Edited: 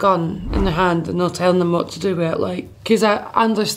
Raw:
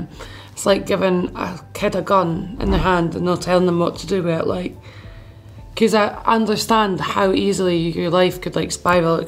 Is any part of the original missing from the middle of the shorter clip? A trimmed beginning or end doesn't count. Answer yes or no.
yes